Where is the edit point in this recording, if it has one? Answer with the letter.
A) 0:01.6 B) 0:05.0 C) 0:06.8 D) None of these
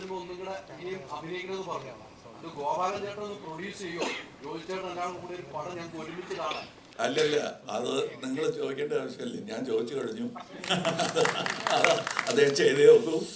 C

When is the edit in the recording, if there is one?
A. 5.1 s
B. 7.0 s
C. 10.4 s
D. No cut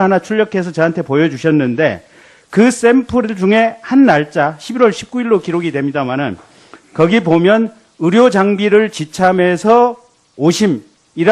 D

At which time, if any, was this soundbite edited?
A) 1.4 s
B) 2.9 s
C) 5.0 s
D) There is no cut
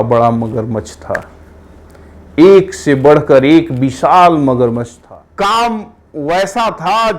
C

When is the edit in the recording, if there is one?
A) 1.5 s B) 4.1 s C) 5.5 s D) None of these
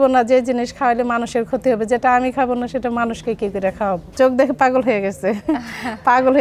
B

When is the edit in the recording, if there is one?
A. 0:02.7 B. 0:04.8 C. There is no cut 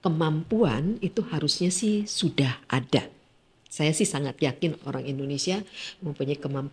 C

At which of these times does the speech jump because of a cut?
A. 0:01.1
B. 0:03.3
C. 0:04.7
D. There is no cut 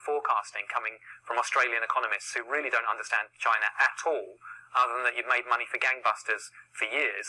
D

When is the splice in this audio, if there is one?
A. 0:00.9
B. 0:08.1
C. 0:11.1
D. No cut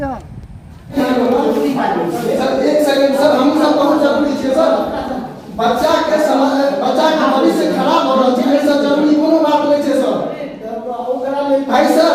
A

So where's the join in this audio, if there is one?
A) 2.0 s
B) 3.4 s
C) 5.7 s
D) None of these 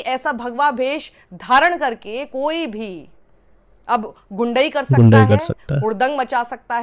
D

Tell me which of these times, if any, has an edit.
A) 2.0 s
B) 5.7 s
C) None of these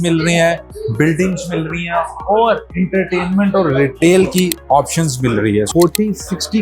B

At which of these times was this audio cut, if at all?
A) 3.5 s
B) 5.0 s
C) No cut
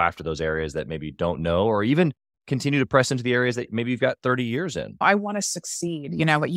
B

